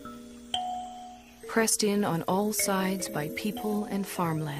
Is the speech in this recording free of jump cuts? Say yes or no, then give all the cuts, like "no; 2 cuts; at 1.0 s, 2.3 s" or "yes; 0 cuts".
no; 1 cut; at 1.5 s